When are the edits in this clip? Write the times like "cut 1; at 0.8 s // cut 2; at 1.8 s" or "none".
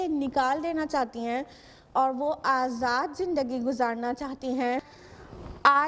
cut 1; at 4.8 s